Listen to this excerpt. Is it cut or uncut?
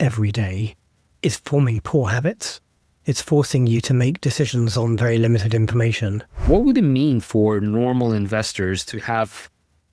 cut